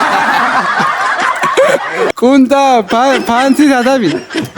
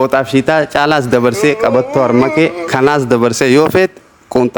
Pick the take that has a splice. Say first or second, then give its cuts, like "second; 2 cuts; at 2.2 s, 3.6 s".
first; 1 cut; at 2.1 s